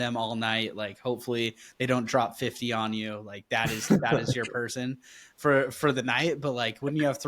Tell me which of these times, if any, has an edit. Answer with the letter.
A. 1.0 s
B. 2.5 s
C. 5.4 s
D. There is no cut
D